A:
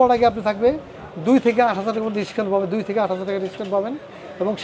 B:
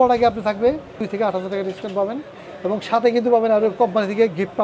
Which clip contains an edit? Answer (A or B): B